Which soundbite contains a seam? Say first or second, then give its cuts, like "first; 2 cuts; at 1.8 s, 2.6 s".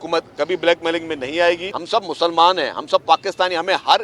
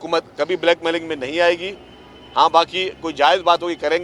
first; 1 cut; at 1.7 s